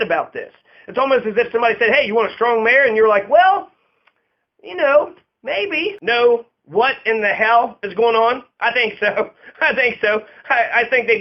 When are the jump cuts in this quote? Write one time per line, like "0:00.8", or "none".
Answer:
0:06.0